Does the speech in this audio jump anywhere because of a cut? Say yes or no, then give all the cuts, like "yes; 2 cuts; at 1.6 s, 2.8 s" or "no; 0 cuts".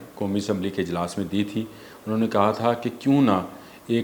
no; 0 cuts